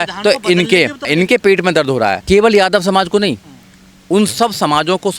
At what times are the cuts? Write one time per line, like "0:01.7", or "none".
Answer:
0:02.2

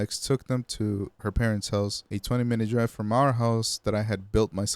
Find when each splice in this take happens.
0:02.1

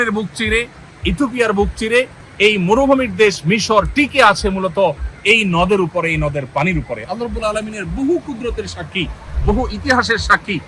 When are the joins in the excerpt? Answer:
0:02.2

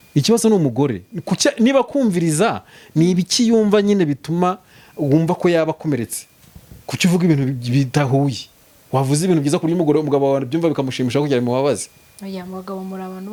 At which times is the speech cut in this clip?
none

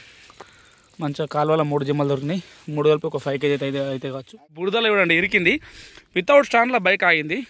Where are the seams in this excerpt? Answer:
0:04.6

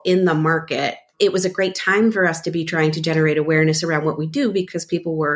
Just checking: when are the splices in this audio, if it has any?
0:01.1

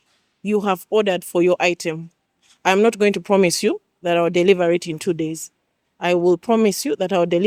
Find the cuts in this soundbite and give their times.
none

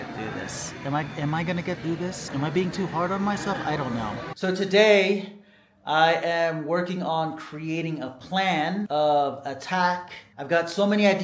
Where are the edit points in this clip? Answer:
0:02.2
0:04.3

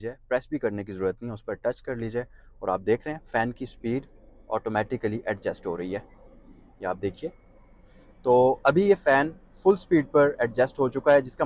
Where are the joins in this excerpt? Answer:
none

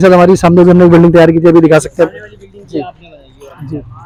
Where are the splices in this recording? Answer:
none

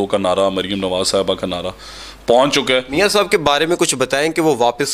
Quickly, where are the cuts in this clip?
0:02.9

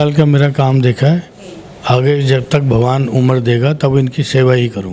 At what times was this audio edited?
none

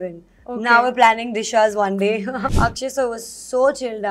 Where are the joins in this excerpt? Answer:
0:02.5

